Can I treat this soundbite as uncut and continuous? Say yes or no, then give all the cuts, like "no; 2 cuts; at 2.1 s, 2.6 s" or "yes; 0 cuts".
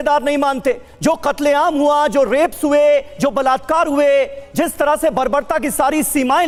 yes; 0 cuts